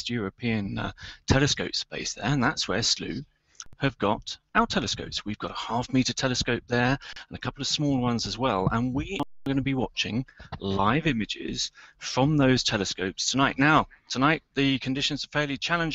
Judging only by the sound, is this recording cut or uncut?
uncut